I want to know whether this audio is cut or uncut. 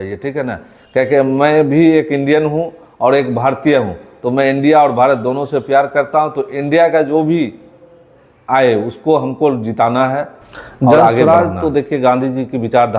cut